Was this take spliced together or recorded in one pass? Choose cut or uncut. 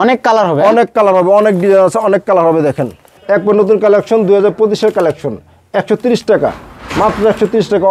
cut